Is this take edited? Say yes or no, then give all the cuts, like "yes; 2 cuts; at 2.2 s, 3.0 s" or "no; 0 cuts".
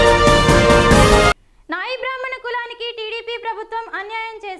no; 0 cuts